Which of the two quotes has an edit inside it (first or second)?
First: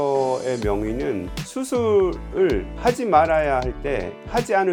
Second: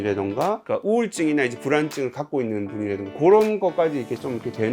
second